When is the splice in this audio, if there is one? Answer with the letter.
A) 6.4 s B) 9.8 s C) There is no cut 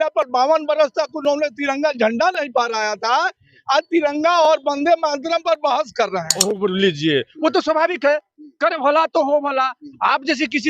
A